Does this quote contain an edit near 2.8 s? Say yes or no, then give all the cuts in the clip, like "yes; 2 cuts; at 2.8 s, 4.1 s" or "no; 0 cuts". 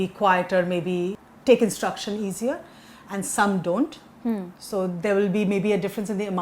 no; 1 cut; at 1.3 s